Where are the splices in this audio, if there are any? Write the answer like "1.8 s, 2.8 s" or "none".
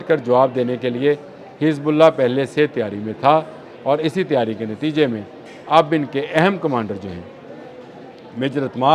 none